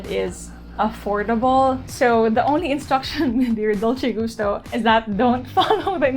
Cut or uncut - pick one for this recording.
cut